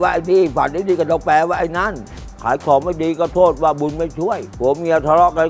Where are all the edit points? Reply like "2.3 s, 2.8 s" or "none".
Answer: 2.3 s, 4.5 s